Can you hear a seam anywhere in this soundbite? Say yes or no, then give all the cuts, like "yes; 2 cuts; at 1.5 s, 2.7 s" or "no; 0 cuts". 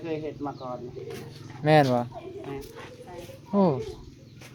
no; 0 cuts